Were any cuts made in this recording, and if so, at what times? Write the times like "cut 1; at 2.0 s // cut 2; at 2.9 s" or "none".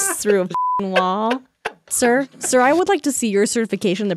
cut 1; at 1.8 s